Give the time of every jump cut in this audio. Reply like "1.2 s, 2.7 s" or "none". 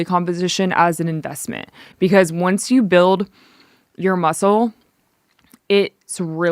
none